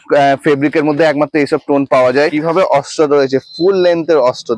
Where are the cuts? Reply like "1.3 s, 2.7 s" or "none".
2.4 s